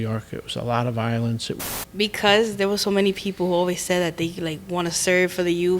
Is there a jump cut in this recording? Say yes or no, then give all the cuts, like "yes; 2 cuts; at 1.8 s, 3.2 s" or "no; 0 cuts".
yes; 1 cut; at 1.6 s